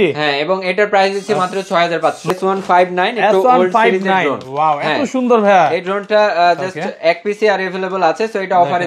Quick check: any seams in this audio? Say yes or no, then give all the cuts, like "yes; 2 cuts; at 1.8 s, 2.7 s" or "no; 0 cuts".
yes; 1 cut; at 2.3 s